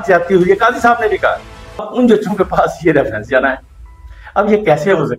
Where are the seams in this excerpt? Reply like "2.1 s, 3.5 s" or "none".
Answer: 1.9 s